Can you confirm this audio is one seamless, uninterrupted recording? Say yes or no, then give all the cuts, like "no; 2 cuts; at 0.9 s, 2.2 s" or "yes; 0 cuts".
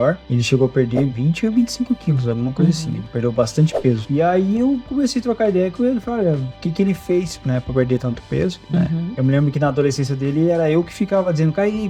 yes; 0 cuts